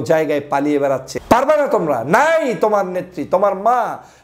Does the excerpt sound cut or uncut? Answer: cut